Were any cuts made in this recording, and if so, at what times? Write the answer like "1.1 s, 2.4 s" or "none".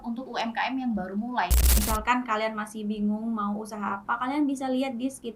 1.7 s